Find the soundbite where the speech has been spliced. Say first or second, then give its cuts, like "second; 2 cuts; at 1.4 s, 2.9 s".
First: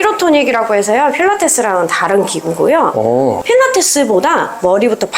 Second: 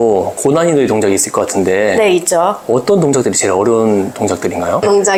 first; 1 cut; at 3.4 s